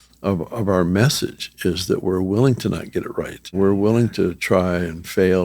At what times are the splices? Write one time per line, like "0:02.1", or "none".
0:03.5

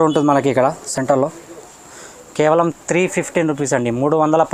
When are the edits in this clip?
none

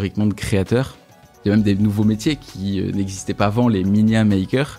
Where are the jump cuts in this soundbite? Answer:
0:01.3

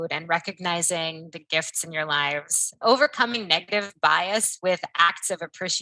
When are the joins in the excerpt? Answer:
0:02.6

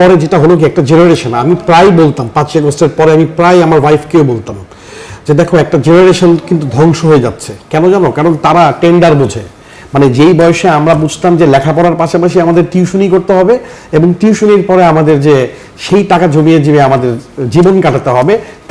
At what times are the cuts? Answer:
none

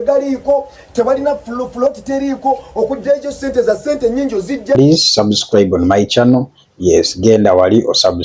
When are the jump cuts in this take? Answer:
0:04.8

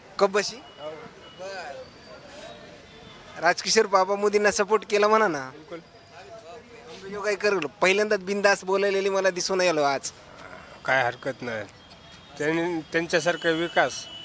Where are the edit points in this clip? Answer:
none

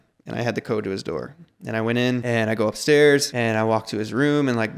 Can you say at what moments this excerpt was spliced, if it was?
0:02.2
0:03.3

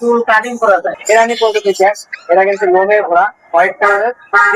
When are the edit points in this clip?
0:00.9

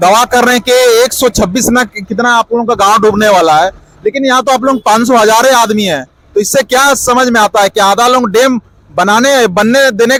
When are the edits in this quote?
none

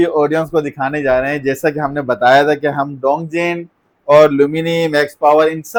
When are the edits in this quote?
none

